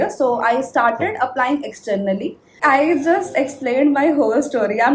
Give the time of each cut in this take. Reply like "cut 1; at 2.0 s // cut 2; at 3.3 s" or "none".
cut 1; at 2.6 s